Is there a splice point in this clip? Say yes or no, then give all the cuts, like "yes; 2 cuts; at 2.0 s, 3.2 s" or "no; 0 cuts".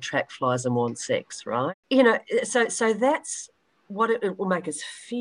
yes; 1 cut; at 1.7 s